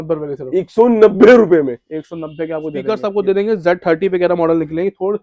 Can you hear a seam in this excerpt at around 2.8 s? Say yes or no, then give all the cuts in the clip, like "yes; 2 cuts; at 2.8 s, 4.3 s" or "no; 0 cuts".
yes; 1 cut; at 2.8 s